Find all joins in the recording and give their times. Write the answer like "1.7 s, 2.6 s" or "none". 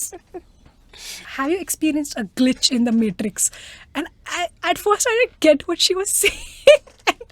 1.2 s